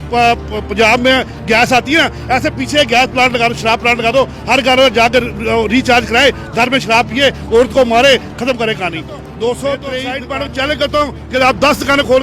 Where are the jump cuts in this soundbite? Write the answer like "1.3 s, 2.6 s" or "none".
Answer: 10.1 s